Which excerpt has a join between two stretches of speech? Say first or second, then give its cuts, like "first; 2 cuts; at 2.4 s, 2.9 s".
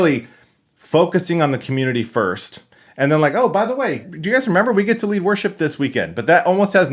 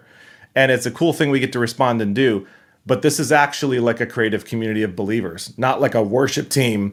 first; 1 cut; at 4.0 s